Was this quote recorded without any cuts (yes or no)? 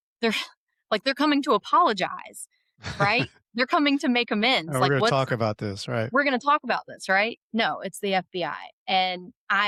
yes